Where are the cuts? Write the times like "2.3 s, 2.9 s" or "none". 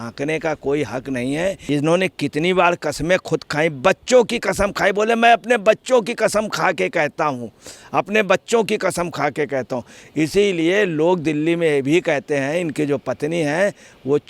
1.6 s